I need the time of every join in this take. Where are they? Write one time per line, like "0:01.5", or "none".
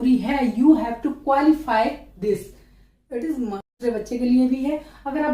0:03.8